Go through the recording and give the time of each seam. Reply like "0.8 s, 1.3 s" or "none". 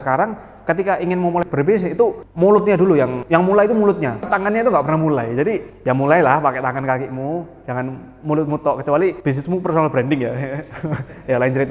none